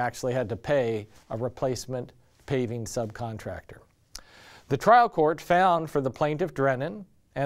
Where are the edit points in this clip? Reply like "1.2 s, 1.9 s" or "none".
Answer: 1.2 s